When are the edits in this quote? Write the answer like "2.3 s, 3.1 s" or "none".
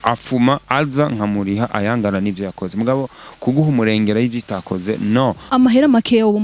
5.5 s